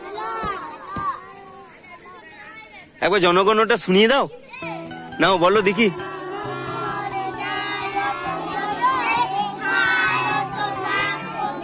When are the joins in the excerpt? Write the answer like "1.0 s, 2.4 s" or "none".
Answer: none